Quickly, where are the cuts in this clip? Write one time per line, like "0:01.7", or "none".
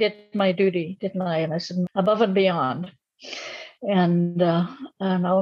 0:01.8